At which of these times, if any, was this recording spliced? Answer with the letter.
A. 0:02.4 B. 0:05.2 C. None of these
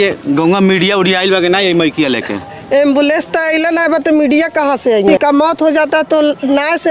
B